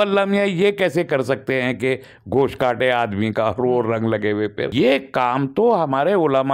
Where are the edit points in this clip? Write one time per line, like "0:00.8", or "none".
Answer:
0:04.6